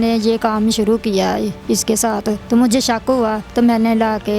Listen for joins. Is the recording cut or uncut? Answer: cut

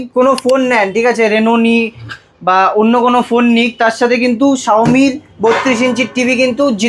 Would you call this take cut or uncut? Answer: uncut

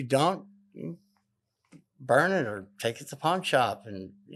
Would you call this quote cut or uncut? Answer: uncut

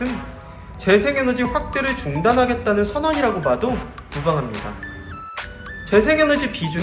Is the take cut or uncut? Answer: cut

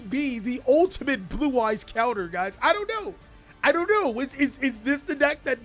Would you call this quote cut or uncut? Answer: uncut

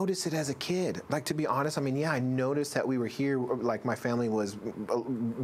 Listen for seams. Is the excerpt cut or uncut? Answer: uncut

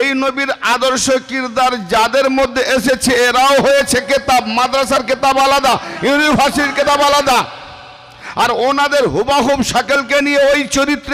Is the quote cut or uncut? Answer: uncut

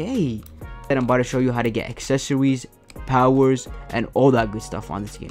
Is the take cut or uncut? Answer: cut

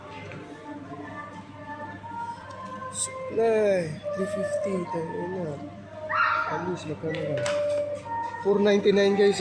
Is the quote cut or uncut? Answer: uncut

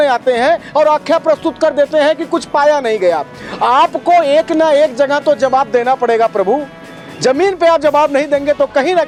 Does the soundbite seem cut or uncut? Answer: uncut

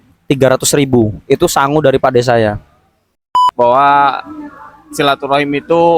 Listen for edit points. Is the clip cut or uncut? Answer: cut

